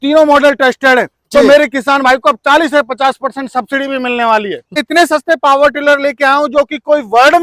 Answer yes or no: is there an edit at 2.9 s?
no